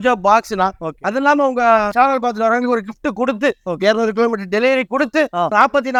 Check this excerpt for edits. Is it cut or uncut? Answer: uncut